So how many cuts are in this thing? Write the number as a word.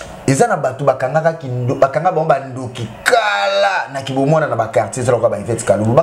zero